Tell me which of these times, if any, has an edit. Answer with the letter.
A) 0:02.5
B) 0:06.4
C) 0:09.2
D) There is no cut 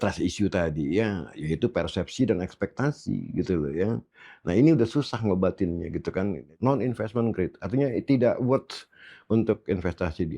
B